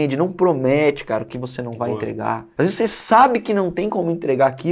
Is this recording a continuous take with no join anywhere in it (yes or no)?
no